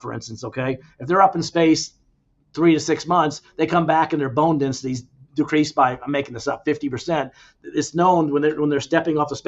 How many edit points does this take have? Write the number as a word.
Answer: zero